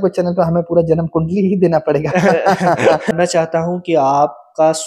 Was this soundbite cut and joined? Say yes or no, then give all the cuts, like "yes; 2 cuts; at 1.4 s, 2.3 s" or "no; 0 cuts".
yes; 1 cut; at 3.1 s